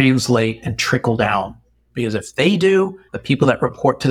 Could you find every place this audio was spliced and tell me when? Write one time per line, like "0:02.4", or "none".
0:03.1